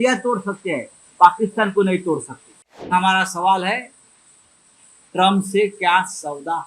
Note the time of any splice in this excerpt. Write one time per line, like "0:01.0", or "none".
0:02.9